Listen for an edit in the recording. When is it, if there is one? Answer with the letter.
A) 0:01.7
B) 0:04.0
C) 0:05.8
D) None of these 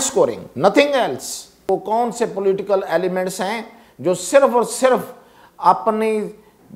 A